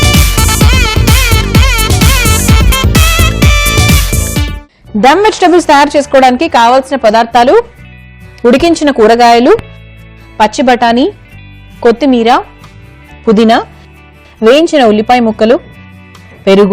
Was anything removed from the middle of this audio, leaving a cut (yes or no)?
yes